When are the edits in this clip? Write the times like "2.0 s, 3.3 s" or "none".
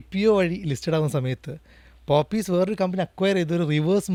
none